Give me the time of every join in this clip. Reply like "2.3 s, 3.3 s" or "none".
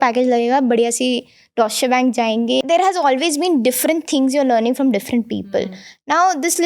2.6 s